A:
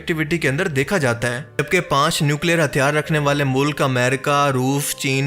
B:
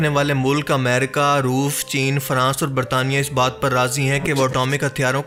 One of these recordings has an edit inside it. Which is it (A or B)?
A